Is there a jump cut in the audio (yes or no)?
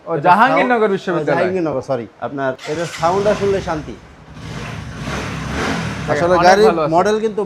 no